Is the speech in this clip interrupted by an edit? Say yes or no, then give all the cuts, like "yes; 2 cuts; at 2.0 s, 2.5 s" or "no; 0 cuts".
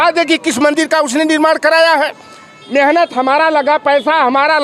no; 0 cuts